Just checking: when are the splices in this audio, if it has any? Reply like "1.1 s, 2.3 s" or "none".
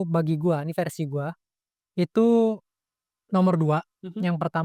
none